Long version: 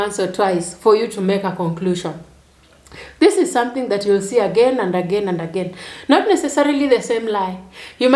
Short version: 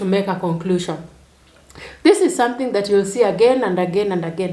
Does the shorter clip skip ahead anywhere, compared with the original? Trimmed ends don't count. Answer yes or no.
no